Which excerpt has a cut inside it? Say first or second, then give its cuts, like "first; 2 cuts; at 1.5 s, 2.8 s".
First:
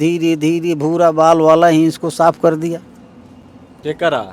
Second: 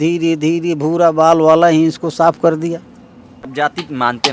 second; 1 cut; at 3.4 s